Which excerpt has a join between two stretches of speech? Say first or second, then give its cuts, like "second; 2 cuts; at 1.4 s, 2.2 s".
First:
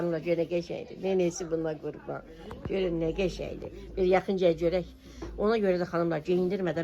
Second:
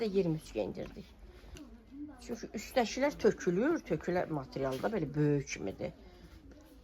second; 1 cut; at 1.6 s